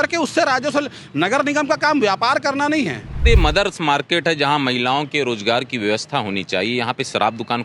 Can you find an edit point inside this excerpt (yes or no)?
yes